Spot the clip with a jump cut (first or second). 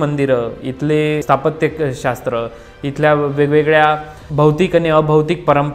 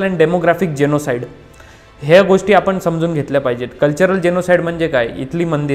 first